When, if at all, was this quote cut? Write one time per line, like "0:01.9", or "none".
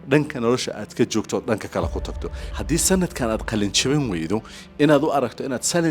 0:02.5

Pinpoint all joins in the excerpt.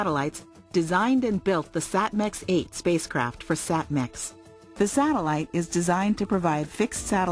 0:05.2

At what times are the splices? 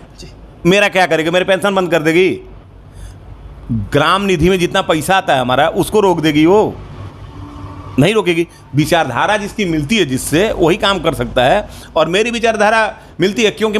none

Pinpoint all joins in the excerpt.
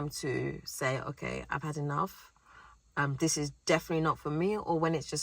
none

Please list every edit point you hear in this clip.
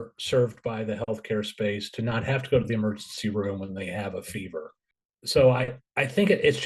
0:04.8

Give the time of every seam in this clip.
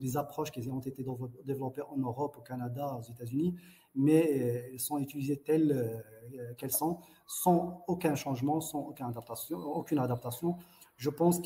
none

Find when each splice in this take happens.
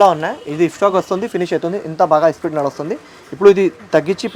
none

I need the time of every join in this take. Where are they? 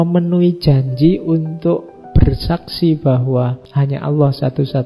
0:03.6

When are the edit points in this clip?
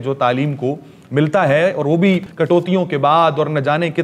0:02.3

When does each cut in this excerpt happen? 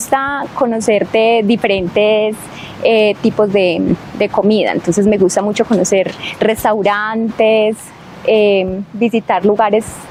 none

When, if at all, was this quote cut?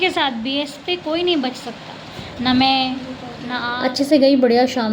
0:03.9

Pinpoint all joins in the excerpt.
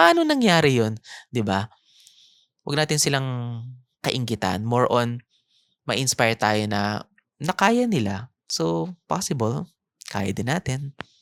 none

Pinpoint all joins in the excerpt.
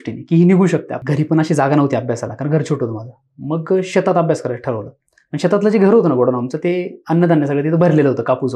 0:01.0

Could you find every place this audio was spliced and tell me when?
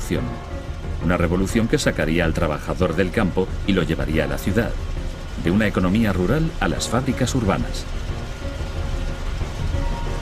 0:05.1

